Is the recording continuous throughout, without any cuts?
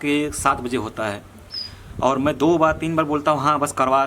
yes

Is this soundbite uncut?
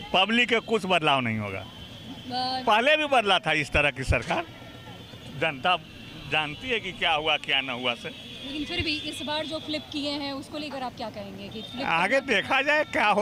yes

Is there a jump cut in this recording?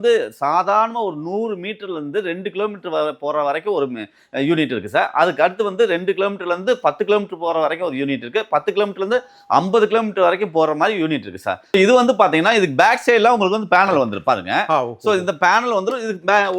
yes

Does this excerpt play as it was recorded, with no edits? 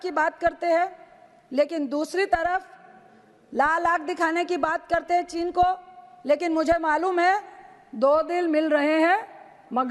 yes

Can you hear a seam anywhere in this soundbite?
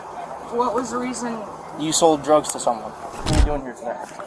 yes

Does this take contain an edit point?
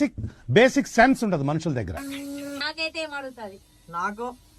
yes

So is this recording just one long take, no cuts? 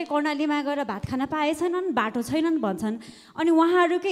yes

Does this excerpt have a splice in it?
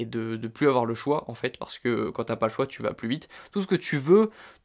yes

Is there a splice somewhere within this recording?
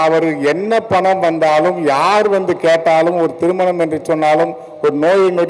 no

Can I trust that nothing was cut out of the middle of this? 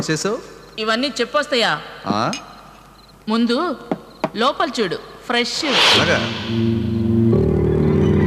yes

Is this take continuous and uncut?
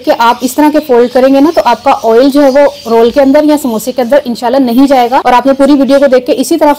no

